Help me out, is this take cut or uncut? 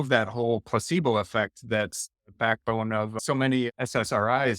cut